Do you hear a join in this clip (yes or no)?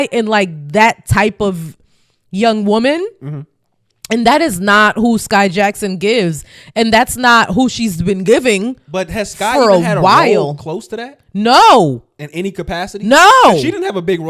no